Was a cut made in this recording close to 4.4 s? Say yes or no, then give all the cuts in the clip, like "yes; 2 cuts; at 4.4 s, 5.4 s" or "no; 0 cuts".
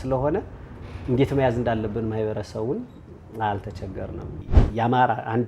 yes; 1 cut; at 4.4 s